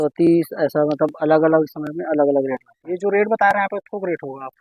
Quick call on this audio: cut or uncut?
uncut